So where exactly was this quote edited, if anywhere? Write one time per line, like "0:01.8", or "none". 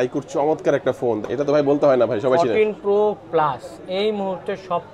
0:01.2